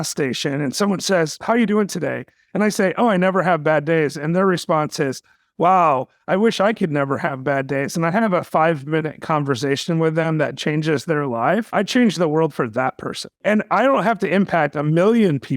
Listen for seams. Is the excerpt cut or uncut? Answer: cut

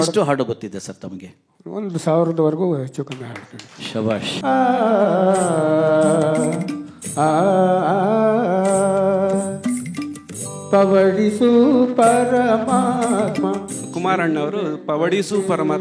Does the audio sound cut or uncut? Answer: cut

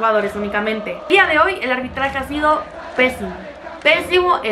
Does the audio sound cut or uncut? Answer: cut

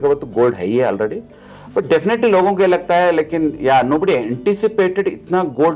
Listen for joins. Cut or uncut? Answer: uncut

